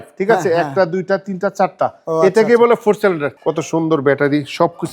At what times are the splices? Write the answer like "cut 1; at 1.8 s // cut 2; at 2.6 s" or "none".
cut 1; at 3.3 s